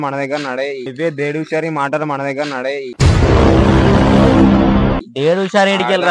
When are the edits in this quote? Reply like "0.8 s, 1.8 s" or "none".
0.9 s, 3.0 s, 4.9 s